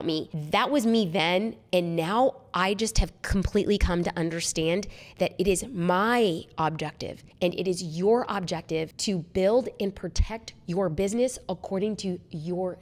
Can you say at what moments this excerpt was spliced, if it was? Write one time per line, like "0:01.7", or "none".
none